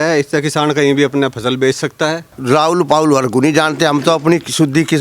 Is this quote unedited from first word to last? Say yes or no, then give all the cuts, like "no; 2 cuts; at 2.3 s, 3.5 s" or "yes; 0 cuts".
no; 1 cut; at 2.3 s